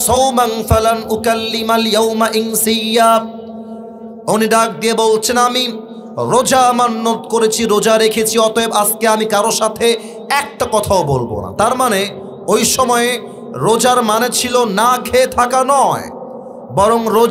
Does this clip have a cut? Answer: no; 0 cuts

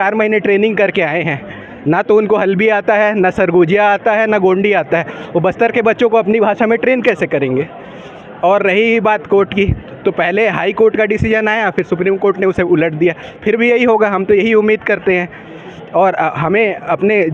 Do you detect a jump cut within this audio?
no; 0 cuts

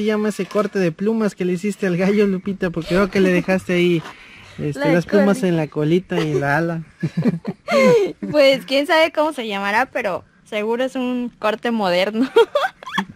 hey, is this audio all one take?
yes; 0 cuts

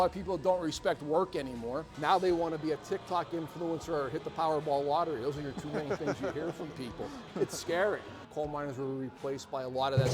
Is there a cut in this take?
yes; 2 cuts; at 1.9 s, 8.2 s

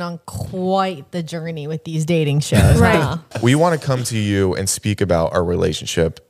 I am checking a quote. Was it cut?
yes; 1 cut; at 3.3 s

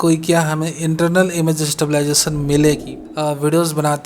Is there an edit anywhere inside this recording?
yes; 1 cut; at 3.0 s

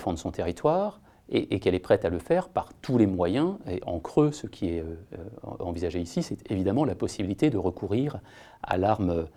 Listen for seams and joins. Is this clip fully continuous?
yes; 0 cuts

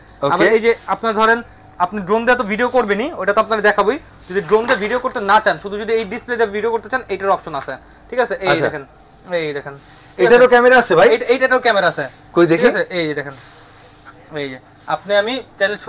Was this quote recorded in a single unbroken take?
yes; 0 cuts

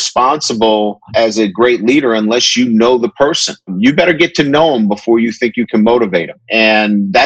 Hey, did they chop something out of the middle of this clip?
yes; 3 cuts; at 1.0 s, 3.7 s, 6.4 s

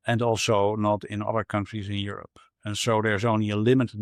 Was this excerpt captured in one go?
yes; 0 cuts

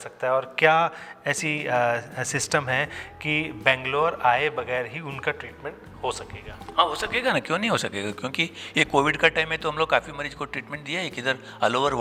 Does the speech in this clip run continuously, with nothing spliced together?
yes; 0 cuts

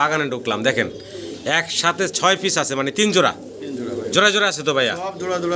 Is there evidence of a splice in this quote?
no; 0 cuts

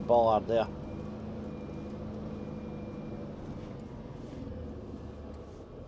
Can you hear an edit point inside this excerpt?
no; 0 cuts

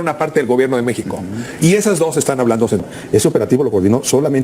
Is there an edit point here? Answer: yes; 1 cut; at 2.9 s

